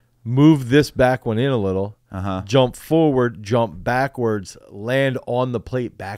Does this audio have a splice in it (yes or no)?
no